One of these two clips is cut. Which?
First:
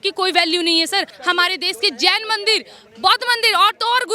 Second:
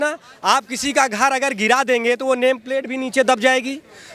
first; 1 cut; at 1.1 s

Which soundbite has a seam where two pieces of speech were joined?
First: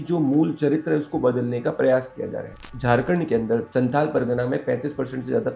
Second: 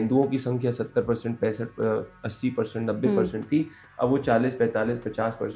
first; 2 cuts; at 2.7 s, 3.7 s

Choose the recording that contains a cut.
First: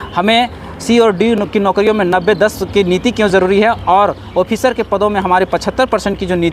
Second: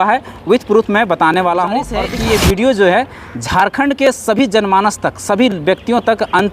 second; 1 cut; at 2.0 s

